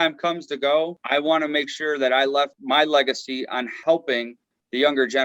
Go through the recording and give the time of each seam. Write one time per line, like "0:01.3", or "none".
0:01.0
0:02.6
0:03.8